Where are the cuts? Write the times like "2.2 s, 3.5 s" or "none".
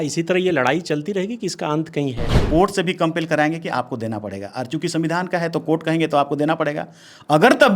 2.3 s